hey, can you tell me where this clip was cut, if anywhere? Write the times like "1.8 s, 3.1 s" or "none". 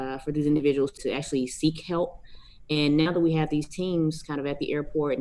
1.0 s

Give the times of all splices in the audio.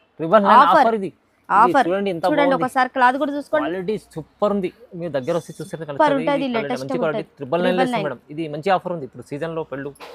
none

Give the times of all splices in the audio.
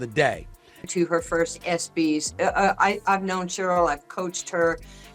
0.9 s

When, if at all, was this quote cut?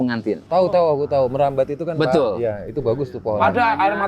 none

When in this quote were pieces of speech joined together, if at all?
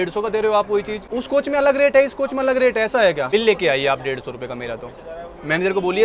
1.0 s, 3.3 s

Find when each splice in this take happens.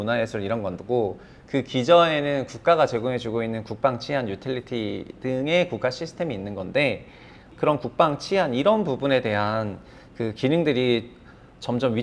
7.5 s

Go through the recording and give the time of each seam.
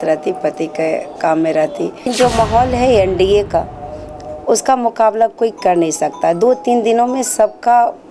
2.1 s

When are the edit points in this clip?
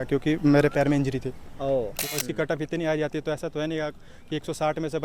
2.0 s

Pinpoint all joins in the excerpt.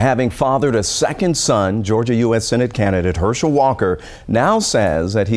none

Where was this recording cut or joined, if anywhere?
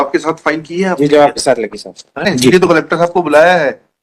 2.3 s

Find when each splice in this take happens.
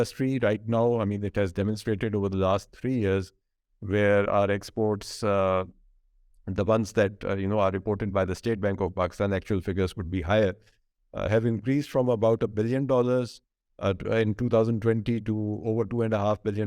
none

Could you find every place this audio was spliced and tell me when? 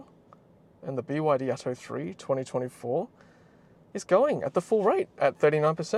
none

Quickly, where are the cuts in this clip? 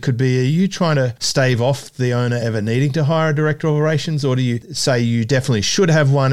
1.2 s

